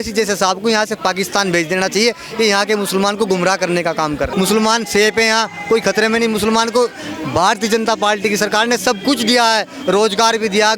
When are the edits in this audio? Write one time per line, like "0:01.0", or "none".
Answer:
0:04.3